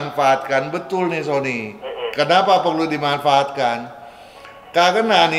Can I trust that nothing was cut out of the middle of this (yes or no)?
yes